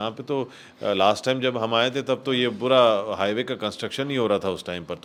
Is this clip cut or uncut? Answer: uncut